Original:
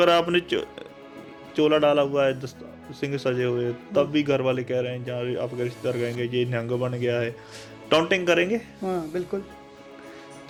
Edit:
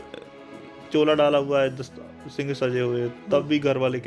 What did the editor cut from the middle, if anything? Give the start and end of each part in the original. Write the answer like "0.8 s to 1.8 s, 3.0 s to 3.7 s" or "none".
none